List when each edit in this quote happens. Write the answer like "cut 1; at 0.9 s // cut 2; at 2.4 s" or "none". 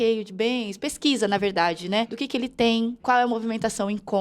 cut 1; at 2.2 s // cut 2; at 3.0 s